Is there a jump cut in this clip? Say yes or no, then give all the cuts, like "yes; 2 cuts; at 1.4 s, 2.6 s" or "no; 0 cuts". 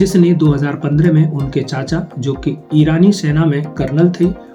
no; 0 cuts